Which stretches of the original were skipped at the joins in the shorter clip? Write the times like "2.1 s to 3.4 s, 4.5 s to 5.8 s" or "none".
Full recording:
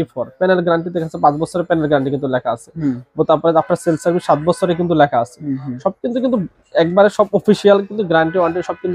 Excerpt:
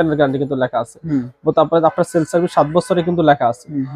none

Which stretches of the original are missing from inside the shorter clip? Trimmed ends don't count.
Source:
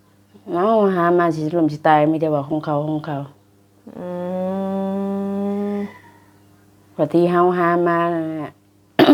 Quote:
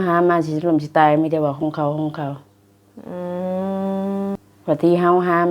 5.3 s to 6.7 s

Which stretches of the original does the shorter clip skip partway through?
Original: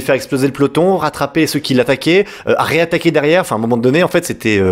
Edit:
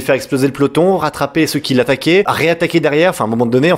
2.3 s to 2.6 s

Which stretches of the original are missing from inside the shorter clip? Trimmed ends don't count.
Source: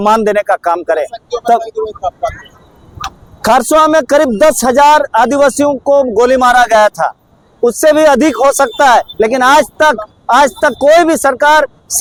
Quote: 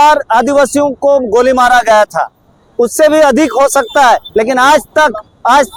none

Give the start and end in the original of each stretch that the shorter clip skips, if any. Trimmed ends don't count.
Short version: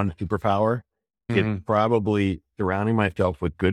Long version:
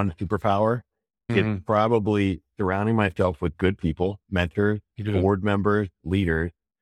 none

